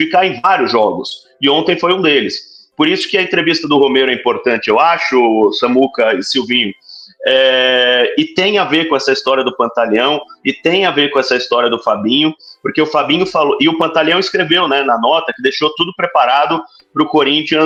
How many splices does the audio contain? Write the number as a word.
zero